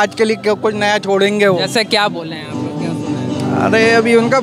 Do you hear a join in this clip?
no; 0 cuts

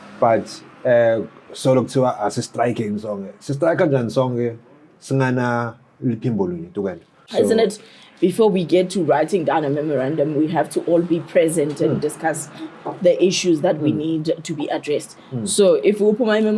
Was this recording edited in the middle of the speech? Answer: no; 0 cuts

